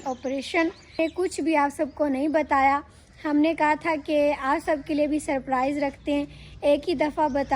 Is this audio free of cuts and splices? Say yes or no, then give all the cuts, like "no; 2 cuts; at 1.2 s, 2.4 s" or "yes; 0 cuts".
no; 1 cut; at 1.0 s